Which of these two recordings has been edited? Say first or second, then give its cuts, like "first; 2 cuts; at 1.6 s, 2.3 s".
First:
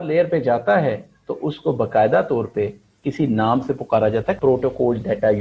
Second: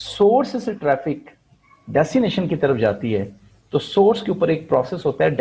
first; 1 cut; at 4.4 s